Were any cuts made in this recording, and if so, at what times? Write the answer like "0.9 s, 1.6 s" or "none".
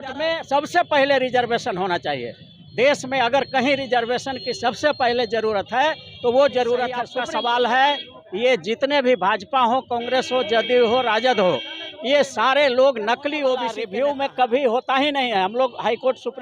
7.1 s, 13.8 s